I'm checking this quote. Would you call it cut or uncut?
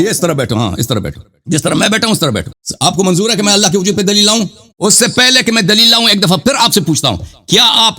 cut